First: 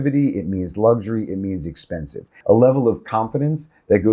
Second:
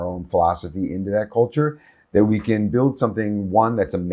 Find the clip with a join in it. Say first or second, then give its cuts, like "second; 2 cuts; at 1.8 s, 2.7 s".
first; 1 cut; at 2.3 s